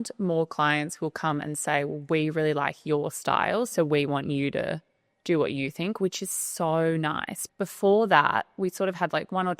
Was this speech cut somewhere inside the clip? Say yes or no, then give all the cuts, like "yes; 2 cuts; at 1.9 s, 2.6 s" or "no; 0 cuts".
yes; 1 cut; at 7.3 s